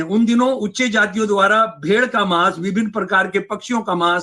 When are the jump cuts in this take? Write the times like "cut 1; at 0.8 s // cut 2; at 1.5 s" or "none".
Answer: none